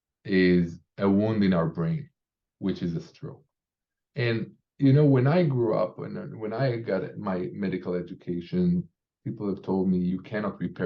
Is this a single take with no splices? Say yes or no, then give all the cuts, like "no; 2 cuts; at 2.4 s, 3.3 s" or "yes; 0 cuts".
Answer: yes; 0 cuts